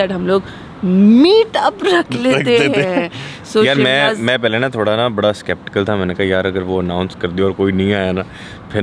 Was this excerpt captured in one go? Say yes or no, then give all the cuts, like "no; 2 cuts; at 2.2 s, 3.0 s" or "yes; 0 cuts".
yes; 0 cuts